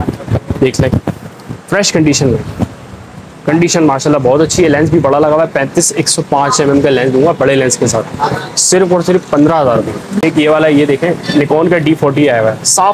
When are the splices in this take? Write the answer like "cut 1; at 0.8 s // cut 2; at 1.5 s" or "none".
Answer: cut 1; at 10.1 s